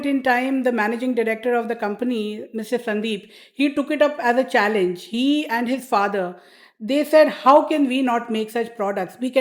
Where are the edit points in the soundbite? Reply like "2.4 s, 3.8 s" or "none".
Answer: none